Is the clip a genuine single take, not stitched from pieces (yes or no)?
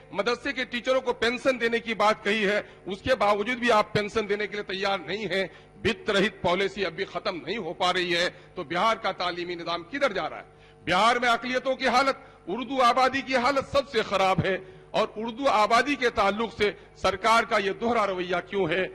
yes